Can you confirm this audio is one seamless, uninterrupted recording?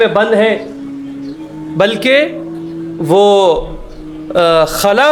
yes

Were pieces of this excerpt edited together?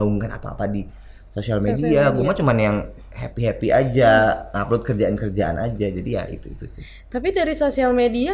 no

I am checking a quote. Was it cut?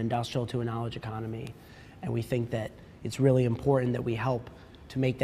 no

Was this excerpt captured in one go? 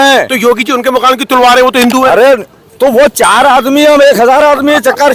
yes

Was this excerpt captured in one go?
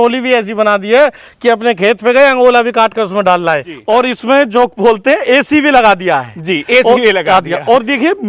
no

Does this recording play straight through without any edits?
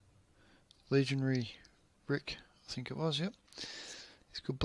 yes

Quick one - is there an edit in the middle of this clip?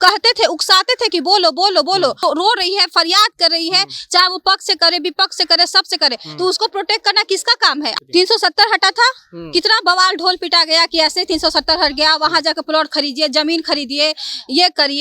yes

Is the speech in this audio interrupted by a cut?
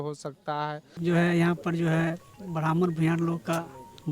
yes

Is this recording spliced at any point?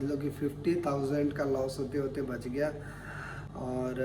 no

